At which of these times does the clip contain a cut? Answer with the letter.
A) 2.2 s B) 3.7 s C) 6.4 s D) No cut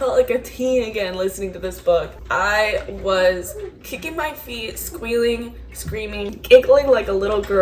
C